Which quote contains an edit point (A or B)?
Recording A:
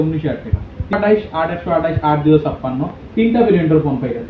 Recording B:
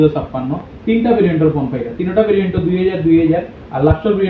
A